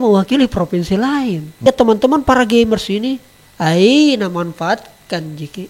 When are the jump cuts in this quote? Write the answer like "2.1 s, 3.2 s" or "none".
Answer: 1.6 s